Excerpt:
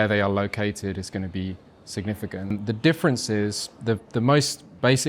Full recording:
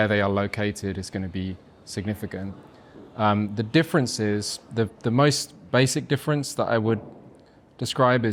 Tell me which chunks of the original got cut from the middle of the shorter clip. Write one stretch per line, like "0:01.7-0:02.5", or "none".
0:02.5-0:03.4